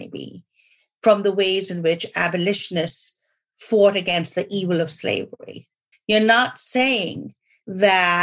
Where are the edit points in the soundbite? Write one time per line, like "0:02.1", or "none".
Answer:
0:05.9

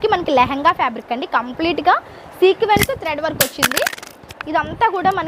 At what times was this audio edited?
none

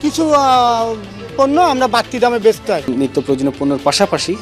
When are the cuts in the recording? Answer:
0:02.9

